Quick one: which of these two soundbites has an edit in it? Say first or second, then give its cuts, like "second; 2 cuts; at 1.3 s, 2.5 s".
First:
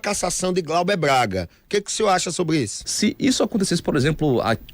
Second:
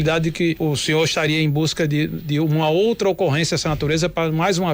first; 2 cuts; at 1.6 s, 2.8 s